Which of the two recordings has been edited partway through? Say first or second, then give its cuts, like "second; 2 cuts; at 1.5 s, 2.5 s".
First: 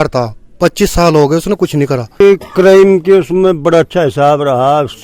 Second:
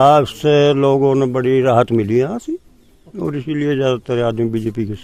first; 1 cut; at 2.2 s